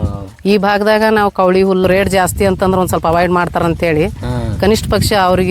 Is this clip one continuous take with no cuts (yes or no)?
no